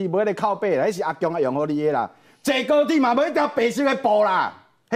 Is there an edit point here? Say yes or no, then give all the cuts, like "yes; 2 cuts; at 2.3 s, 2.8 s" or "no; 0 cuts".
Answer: no; 0 cuts